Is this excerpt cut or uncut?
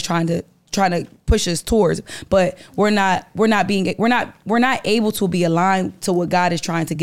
uncut